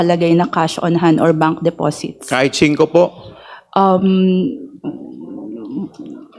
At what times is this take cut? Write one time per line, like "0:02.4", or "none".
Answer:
none